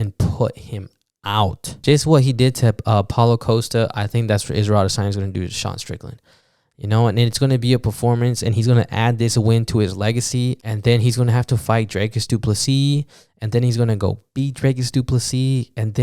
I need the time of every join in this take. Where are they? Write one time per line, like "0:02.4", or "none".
0:01.7
0:10.7